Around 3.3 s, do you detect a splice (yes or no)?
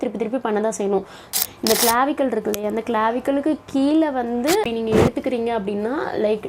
no